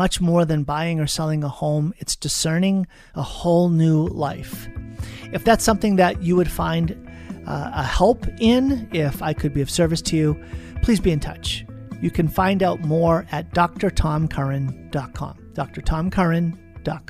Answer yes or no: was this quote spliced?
no